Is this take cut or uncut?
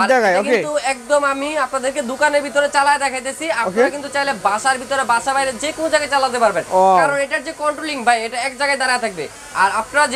uncut